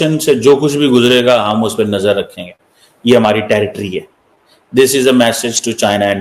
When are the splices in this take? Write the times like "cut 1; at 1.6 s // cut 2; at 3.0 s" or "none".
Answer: none